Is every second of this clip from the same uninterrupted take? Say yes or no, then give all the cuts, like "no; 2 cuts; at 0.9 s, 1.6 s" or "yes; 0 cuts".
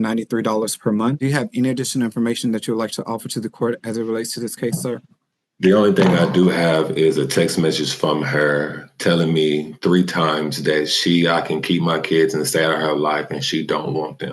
no; 1 cut; at 1.2 s